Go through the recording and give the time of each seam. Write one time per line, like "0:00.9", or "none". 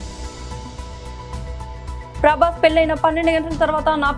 0:02.2